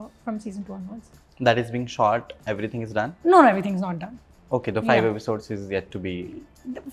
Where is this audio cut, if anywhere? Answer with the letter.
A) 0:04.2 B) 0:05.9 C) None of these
C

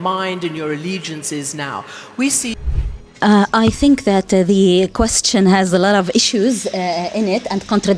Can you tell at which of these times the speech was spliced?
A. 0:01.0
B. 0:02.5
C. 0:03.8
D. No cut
B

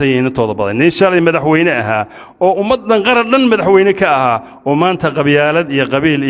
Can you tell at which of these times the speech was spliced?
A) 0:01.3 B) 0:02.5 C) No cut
C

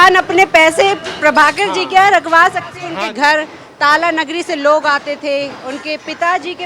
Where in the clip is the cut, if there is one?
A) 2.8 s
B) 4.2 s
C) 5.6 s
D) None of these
A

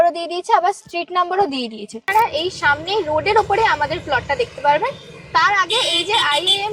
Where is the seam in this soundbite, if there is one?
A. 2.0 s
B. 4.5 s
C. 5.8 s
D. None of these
A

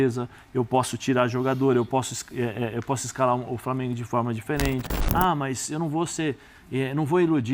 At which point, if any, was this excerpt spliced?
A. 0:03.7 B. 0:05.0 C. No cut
B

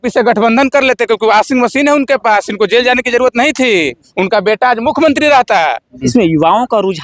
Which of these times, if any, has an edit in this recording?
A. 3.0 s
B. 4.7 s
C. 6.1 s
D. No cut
C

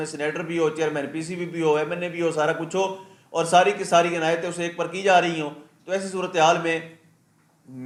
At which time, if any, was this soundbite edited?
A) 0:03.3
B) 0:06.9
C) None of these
C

